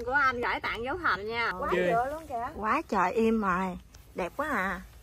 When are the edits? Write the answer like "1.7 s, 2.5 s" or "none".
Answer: 1.5 s